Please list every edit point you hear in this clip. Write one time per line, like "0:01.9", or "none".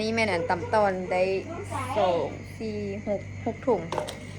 none